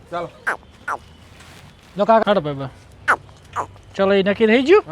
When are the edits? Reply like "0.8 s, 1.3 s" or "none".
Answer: 2.2 s